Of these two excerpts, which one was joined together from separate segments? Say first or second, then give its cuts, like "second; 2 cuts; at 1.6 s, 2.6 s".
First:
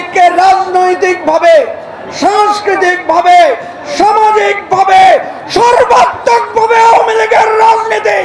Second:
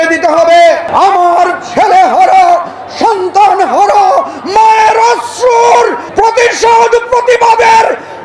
second; 2 cuts; at 0.9 s, 6.0 s